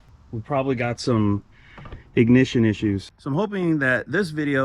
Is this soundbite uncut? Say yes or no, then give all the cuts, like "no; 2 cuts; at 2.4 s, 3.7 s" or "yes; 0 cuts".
no; 1 cut; at 3.1 s